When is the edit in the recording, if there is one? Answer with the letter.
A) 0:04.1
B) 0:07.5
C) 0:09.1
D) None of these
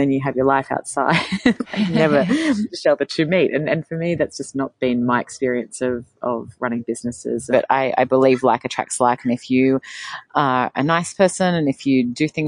B